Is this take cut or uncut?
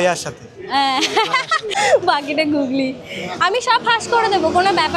cut